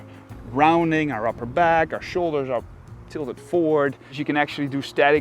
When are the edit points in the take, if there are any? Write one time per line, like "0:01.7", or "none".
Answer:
0:04.2